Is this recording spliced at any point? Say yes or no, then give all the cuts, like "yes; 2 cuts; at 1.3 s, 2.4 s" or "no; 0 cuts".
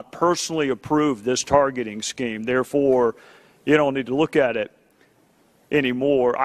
no; 0 cuts